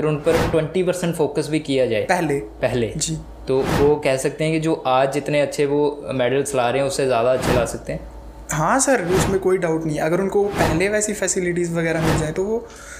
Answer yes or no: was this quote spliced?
no